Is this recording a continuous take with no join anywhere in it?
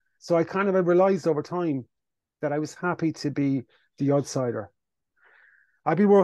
no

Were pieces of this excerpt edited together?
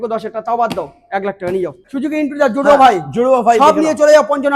yes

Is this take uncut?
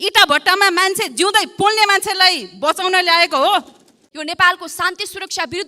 no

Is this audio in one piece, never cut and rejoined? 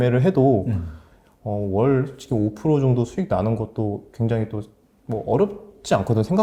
yes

